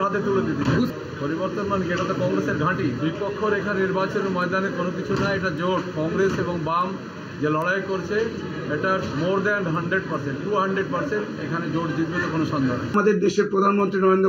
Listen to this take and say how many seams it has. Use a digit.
1